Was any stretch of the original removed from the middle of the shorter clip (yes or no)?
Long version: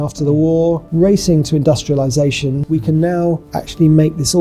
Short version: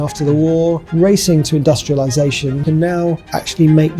yes